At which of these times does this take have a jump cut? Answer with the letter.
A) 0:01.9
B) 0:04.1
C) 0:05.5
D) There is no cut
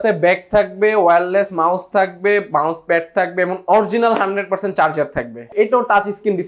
C